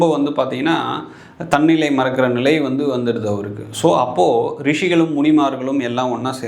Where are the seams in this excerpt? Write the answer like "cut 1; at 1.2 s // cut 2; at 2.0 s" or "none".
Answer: none